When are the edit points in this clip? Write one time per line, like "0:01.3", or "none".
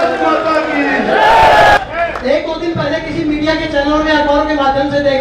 0:01.8